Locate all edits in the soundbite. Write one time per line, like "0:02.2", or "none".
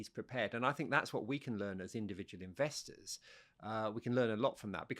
none